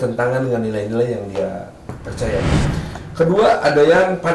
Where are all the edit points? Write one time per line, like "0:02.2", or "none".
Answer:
0:02.7